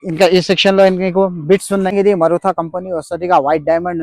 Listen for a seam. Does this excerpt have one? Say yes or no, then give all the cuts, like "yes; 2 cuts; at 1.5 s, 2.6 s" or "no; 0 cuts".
yes; 1 cut; at 1.9 s